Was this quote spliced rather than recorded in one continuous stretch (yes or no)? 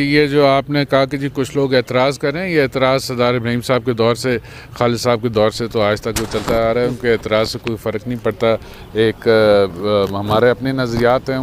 no